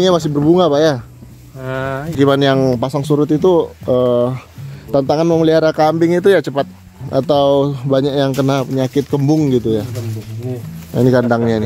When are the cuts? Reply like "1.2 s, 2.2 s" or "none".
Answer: 2.1 s